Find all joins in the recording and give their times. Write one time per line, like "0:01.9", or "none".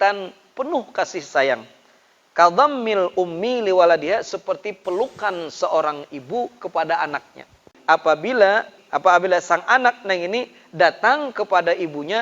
0:07.7
0:08.8